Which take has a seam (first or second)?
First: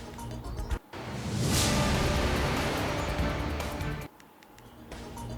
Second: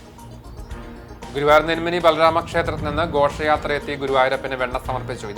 first